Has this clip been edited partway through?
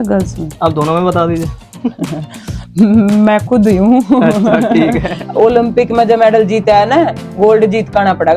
yes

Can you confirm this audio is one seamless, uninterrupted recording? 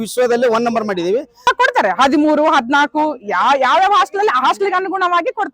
no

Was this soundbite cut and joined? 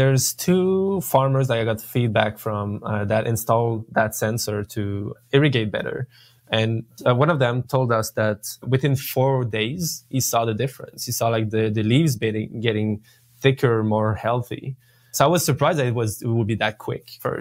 no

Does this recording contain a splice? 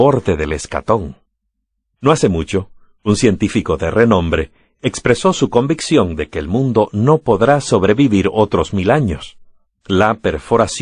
no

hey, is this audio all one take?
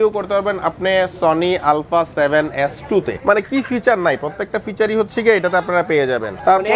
no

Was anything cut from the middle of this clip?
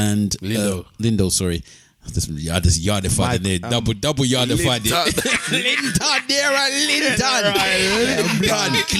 no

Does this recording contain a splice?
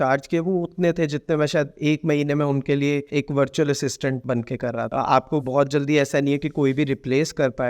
yes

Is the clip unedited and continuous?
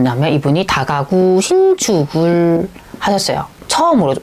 yes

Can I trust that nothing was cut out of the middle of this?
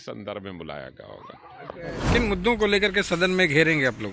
no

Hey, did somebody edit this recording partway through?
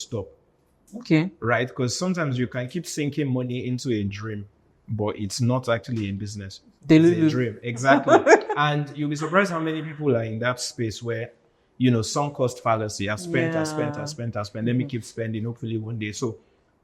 no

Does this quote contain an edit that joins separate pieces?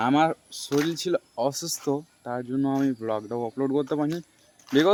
no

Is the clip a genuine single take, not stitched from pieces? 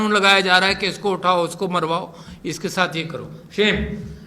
yes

